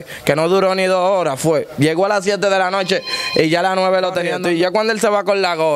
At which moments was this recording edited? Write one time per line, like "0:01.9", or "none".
0:04.3